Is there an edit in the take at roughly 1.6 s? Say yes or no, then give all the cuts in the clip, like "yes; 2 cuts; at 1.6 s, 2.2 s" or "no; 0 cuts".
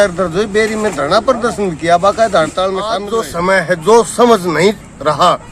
no; 1 cut; at 3.1 s